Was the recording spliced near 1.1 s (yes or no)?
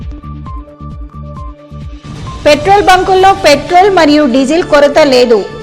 no